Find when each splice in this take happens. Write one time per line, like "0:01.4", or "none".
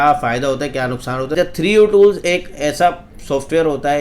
0:01.4